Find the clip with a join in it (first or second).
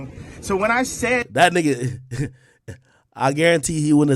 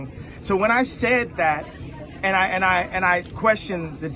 second